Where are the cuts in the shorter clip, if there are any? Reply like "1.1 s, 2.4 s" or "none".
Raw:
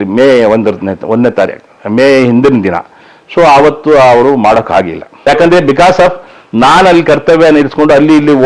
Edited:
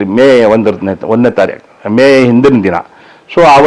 none